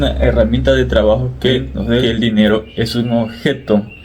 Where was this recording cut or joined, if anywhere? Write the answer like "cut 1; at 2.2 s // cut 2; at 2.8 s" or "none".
cut 1; at 2.0 s